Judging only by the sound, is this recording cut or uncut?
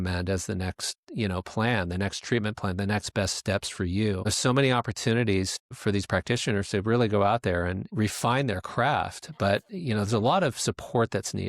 cut